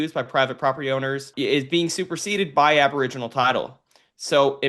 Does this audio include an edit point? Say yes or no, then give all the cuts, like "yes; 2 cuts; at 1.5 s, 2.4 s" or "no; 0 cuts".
yes; 1 cut; at 1.3 s